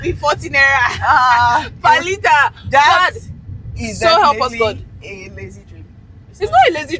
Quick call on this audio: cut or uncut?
uncut